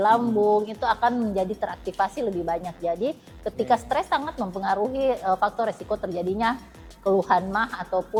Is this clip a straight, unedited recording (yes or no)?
yes